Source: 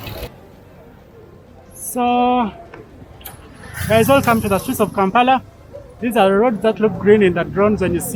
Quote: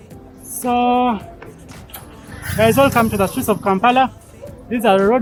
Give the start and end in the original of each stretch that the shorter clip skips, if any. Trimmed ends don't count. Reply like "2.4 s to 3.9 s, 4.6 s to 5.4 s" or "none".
none